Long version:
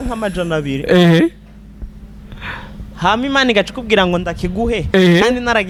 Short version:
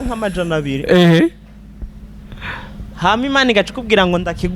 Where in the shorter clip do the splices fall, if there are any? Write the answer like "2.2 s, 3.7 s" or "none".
none